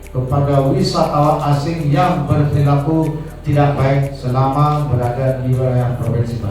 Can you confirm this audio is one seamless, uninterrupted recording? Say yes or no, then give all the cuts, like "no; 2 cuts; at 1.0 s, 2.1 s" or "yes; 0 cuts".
yes; 0 cuts